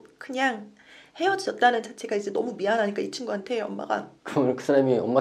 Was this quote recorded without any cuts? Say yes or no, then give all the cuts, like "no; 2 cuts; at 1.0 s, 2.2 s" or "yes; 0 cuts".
no; 1 cut; at 4.2 s